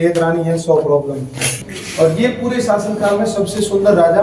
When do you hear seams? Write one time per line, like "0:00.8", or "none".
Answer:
0:01.7